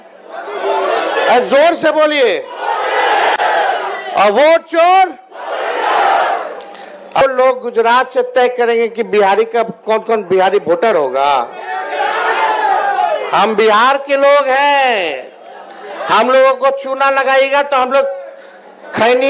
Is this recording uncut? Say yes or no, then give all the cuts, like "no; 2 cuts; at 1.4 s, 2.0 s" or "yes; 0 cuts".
no; 1 cut; at 7.2 s